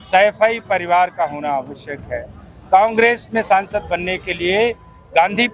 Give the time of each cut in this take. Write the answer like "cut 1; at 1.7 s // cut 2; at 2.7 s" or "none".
none